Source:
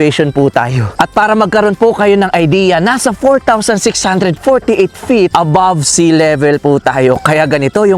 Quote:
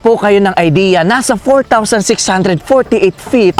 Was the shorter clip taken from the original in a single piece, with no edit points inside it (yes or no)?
yes